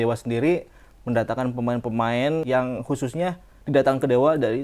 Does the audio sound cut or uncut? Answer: cut